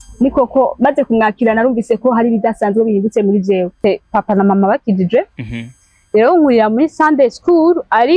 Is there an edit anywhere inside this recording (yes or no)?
yes